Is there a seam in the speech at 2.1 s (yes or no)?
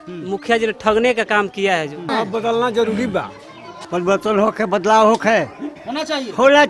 yes